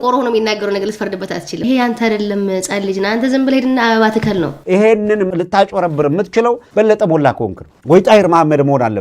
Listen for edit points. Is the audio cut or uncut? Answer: cut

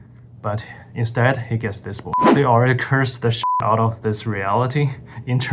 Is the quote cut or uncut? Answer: cut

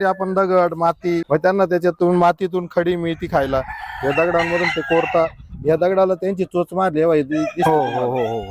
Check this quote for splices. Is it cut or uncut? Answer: cut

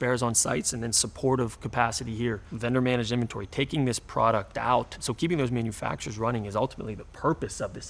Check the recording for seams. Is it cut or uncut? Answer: cut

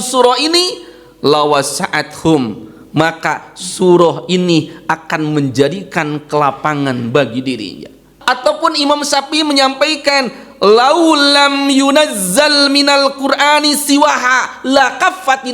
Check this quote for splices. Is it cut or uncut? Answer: cut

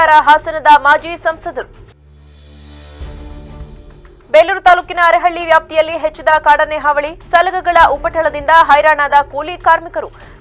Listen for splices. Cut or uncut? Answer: uncut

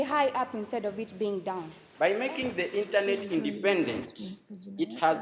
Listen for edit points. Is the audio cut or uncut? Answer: cut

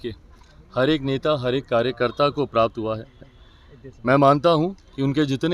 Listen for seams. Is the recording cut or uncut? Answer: uncut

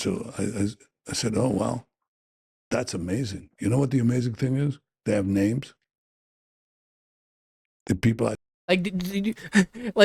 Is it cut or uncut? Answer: uncut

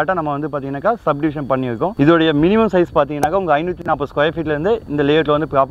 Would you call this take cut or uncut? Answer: cut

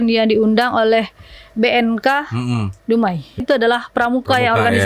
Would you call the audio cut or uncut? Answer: cut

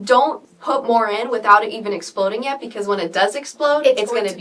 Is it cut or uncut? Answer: uncut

